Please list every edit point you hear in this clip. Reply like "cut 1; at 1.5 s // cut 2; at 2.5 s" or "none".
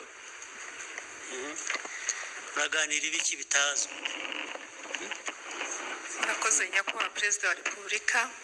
cut 1; at 4.5 s